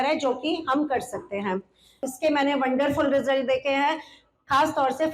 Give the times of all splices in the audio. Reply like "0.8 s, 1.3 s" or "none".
2.1 s